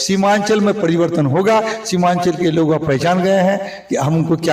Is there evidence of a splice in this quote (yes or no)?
no